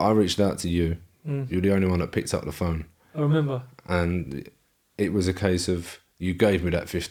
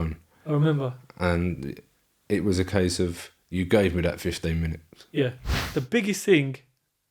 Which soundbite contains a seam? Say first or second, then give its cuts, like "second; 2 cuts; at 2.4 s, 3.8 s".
second; 1 cut; at 5.5 s